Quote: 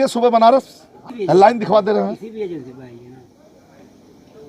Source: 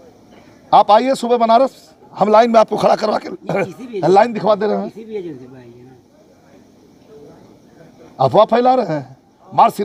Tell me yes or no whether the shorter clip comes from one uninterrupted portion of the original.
no